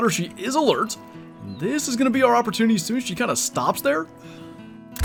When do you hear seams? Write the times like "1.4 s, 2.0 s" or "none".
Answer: none